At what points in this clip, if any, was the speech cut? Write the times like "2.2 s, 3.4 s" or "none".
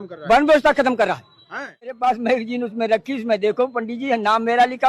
1.9 s